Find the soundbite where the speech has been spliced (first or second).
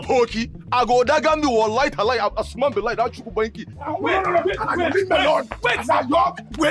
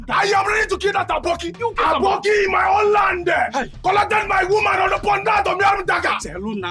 first